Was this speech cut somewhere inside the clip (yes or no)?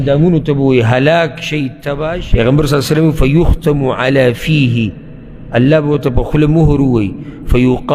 yes